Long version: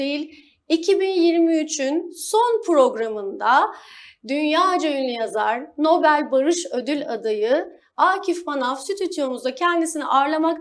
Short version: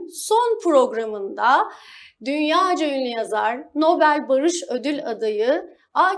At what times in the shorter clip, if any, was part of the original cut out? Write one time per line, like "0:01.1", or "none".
none